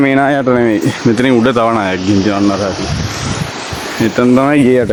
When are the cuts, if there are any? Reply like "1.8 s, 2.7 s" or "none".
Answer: none